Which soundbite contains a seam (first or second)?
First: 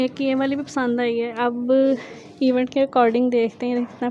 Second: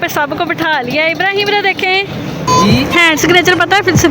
second